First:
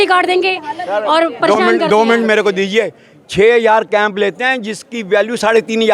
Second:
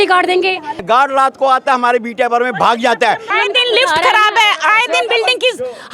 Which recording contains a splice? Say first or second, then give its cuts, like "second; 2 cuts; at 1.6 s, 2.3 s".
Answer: second; 2 cuts; at 0.8 s, 3.3 s